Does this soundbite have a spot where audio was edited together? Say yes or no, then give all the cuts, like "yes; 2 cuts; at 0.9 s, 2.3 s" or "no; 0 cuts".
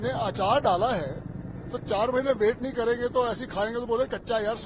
no; 0 cuts